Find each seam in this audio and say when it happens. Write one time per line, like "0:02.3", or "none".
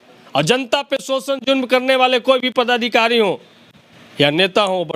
none

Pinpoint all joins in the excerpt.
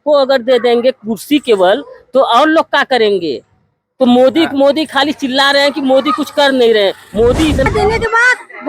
0:07.7

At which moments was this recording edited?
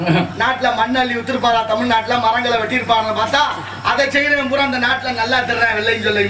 none

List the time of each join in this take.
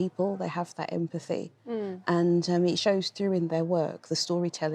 none

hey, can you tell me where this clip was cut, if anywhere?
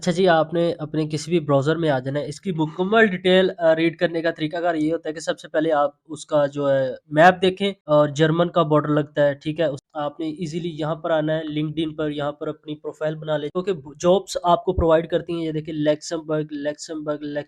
0:07.7
0:09.8
0:13.6

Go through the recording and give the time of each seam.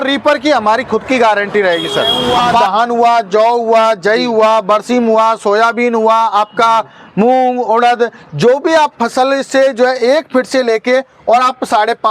0:02.7

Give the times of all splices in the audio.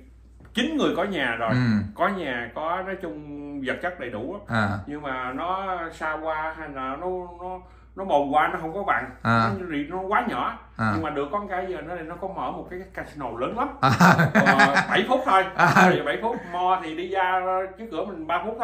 none

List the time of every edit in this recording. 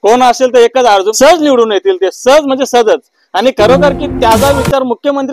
0:01.1

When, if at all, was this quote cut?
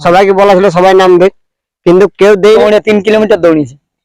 0:02.6

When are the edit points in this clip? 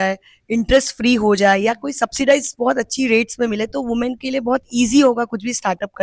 none

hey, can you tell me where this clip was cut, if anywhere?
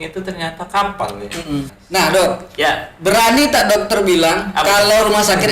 0:01.8

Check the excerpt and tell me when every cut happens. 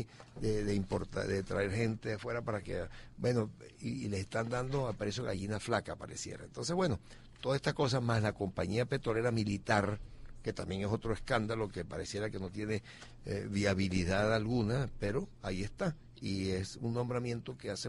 0:11.8

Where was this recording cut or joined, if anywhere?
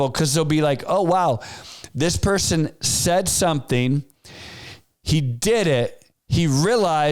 none

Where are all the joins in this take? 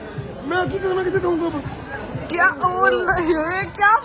none

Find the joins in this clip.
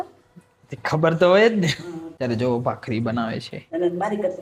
0:02.1

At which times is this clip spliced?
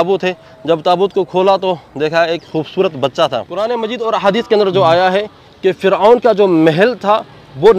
0:03.5

